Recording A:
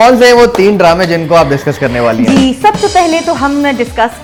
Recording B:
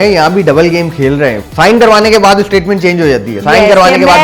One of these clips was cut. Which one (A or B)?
B